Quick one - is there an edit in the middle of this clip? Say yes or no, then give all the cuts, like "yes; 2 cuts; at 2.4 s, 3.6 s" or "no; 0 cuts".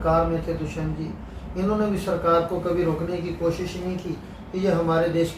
no; 0 cuts